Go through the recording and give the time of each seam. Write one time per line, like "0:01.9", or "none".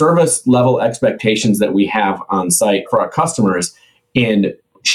0:02.9